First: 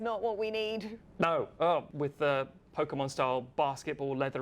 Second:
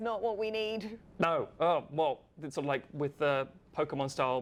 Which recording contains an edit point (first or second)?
first